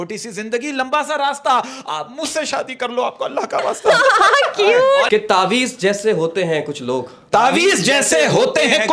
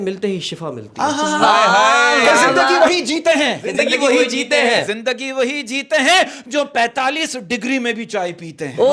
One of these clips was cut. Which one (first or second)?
first